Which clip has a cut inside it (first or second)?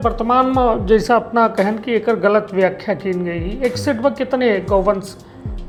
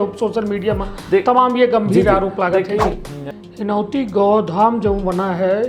second